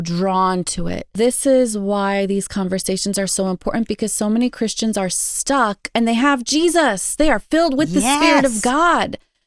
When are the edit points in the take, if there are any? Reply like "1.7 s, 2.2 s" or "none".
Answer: 1.1 s